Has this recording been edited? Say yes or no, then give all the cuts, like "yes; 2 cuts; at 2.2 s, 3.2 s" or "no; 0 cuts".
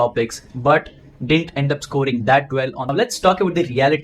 yes; 1 cut; at 2.9 s